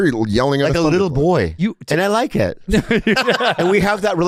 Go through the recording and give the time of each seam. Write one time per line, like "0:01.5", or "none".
none